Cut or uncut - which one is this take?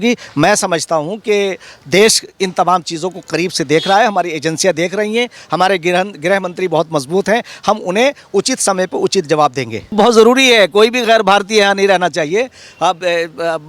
cut